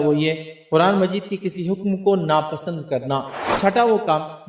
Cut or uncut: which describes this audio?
cut